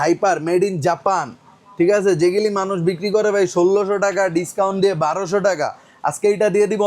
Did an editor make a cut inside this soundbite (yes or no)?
no